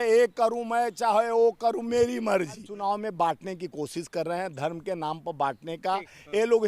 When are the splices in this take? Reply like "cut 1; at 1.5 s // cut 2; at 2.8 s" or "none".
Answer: cut 1; at 2.7 s